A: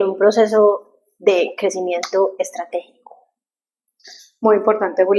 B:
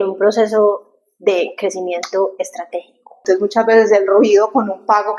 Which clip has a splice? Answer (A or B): B